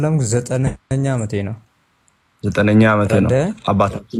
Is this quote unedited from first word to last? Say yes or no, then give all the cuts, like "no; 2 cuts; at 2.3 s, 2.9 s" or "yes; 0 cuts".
yes; 0 cuts